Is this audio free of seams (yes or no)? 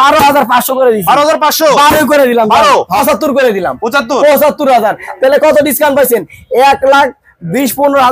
no